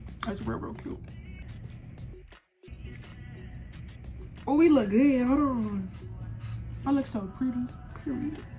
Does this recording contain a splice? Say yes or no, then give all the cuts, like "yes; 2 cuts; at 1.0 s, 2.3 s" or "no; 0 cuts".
yes; 2 cuts; at 1.4 s, 2.7 s